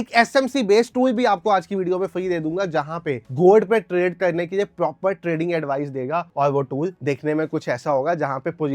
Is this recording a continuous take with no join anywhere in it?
yes; 0 cuts

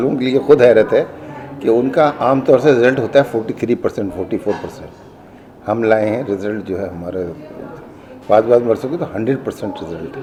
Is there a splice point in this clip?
no; 0 cuts

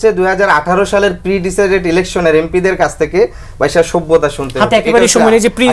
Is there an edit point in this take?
no; 0 cuts

